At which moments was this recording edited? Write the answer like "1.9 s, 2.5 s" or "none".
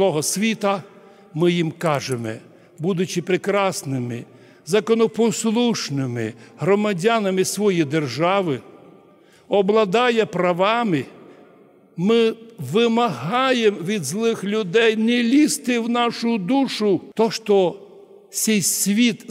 17.1 s